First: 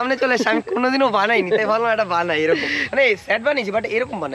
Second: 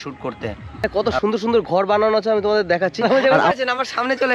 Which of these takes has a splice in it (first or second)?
second